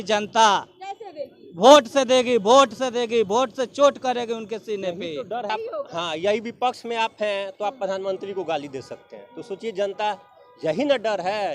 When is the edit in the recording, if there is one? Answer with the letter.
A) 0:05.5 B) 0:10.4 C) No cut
A